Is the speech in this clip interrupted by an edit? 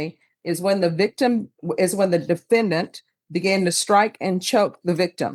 no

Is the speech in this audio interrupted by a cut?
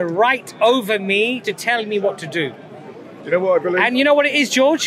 no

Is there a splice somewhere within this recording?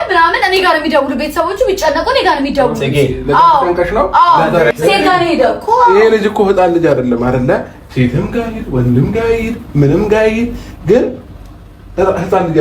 yes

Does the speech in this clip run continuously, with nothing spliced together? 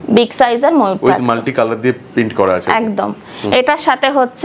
yes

